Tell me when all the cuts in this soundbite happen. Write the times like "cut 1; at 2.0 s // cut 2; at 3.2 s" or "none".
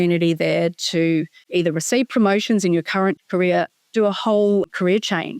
cut 1; at 1.4 s // cut 2; at 3.2 s // cut 3; at 4.7 s

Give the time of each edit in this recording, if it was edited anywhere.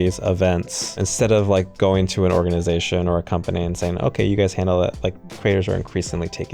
cut 1; at 1.0 s

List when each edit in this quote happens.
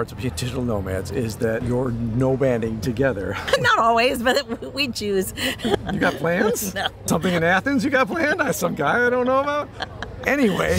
cut 1; at 1.6 s // cut 2; at 3.4 s // cut 3; at 5.8 s // cut 4; at 7.0 s

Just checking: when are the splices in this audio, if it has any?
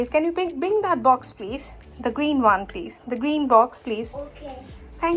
none

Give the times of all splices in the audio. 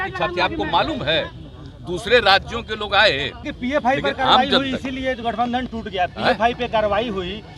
cut 1; at 3.5 s

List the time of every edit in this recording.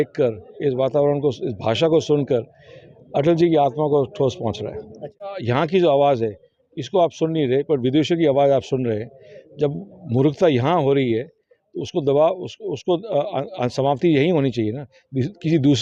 cut 1; at 5.3 s

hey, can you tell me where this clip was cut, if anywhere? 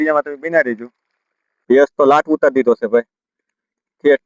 cut 1; at 1.5 s

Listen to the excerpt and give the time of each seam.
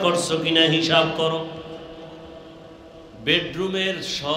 cut 1; at 3.1 s

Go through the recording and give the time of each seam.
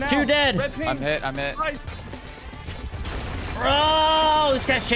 cut 1; at 1.9 s

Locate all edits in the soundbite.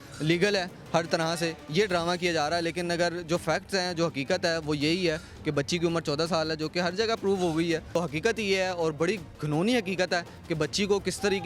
cut 1; at 7.9 s

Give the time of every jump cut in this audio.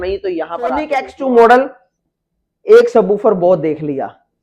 cut 1; at 1.0 s

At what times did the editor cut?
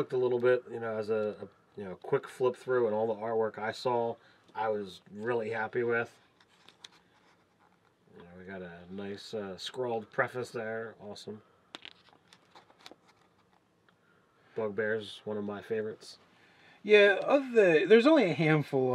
none

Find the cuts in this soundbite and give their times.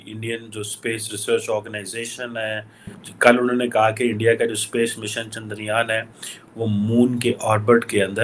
cut 1; at 3.0 s

